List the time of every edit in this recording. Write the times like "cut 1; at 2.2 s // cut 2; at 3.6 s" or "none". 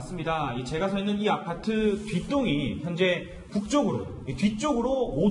cut 1; at 2.1 s